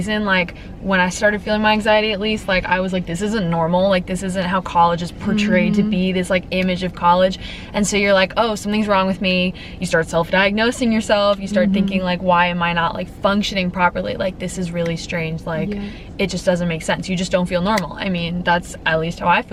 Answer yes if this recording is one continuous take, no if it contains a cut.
yes